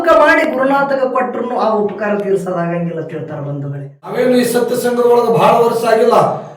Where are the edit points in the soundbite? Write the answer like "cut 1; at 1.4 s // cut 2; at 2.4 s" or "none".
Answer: cut 1; at 4.1 s